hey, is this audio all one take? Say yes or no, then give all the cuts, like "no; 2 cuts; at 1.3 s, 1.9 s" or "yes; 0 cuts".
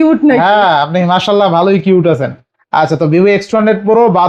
yes; 0 cuts